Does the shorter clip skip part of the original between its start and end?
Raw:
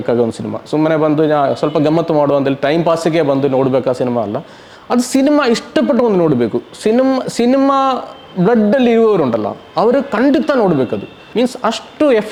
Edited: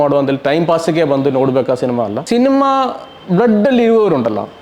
yes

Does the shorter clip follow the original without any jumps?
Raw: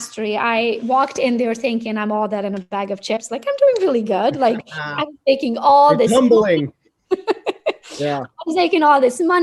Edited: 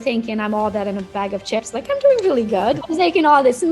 no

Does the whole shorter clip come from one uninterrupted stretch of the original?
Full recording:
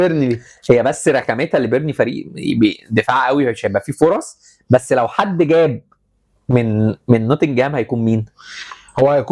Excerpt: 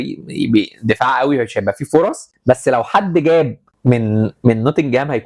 no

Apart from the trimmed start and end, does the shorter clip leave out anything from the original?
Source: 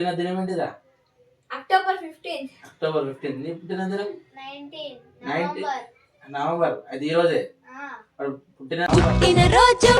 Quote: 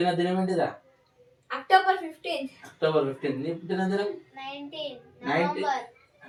no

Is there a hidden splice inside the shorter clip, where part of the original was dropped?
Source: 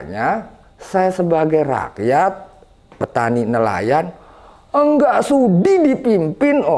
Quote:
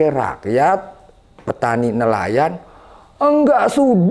no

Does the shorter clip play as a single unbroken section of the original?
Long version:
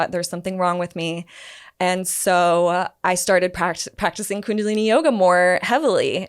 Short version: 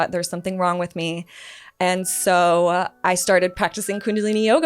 no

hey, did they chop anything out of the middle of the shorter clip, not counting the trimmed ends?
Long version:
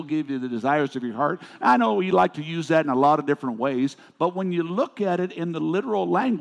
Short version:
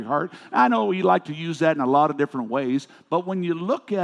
no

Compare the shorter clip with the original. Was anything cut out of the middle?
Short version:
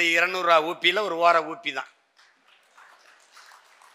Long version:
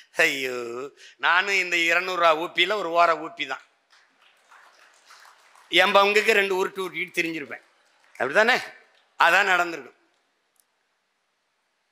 no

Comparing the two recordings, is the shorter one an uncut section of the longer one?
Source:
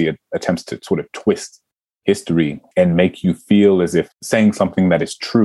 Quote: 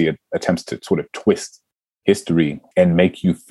yes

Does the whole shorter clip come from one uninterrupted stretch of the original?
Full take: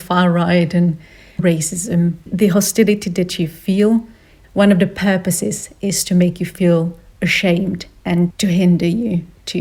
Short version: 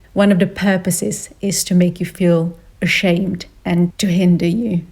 yes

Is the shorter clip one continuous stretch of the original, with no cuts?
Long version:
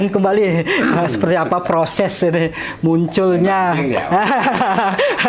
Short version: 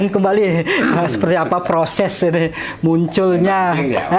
yes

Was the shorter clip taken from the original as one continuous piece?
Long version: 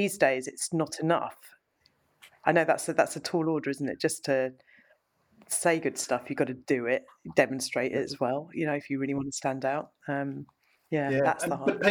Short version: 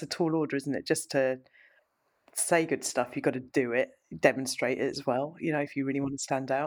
yes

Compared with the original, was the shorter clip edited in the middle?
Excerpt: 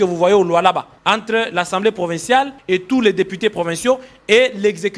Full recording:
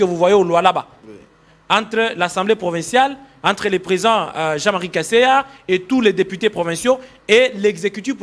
yes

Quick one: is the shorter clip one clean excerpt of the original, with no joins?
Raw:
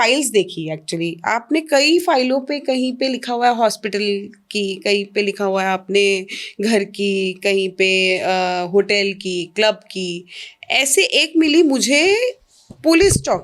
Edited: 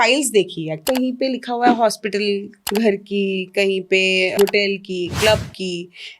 no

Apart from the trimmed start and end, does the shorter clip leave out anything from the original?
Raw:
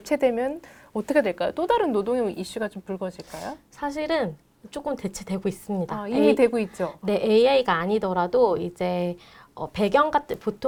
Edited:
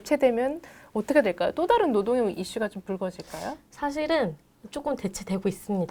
no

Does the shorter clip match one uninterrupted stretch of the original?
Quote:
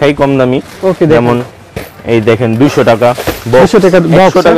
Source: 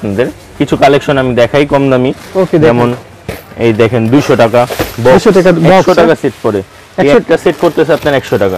yes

